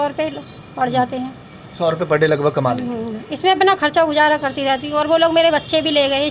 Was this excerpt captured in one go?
yes; 0 cuts

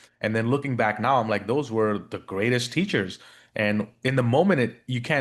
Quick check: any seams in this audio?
no; 0 cuts

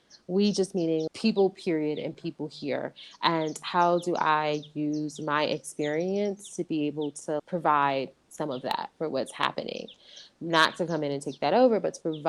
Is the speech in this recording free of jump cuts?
yes; 0 cuts

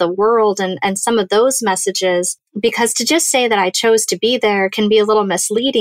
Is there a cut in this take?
yes; 1 cut; at 2.4 s

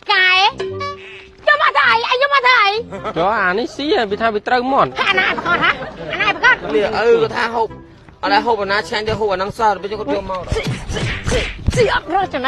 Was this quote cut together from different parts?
yes; 1 cut; at 5.0 s

